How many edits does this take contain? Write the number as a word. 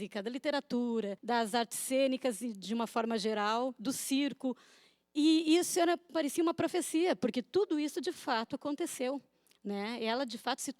one